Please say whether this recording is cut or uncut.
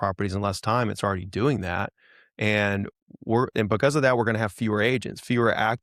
uncut